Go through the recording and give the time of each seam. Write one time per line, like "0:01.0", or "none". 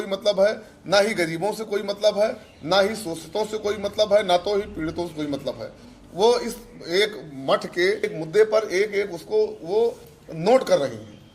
0:08.1

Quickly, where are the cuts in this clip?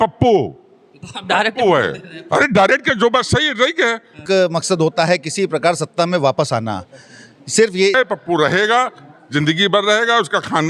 0:04.2
0:08.0

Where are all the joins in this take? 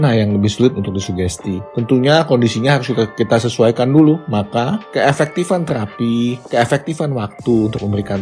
0:04.2

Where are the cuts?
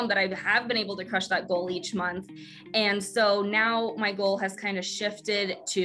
none

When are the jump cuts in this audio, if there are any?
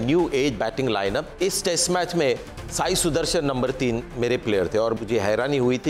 0:01.3
0:05.0

